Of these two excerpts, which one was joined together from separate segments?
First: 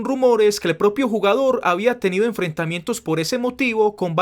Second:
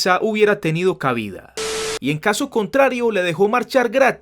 second; 1 cut; at 1.9 s

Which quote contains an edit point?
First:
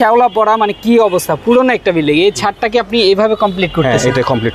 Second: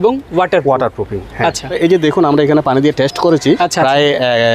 second; 2 cuts; at 1.8 s, 3.6 s

